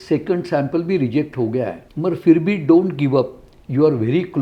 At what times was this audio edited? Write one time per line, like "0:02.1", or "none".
0:01.8